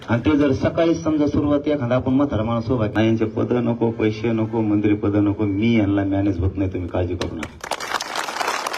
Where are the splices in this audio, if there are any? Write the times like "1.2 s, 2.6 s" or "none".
2.9 s